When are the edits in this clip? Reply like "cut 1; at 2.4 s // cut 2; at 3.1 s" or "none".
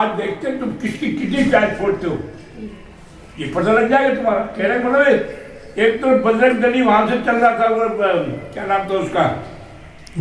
none